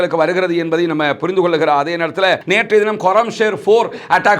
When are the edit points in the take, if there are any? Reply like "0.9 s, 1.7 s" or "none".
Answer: 2.4 s